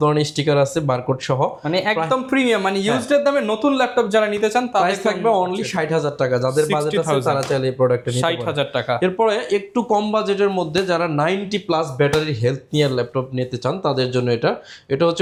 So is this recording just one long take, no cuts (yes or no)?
yes